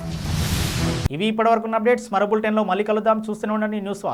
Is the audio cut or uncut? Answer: uncut